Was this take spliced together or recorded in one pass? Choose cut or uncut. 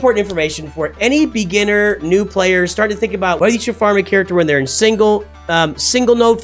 cut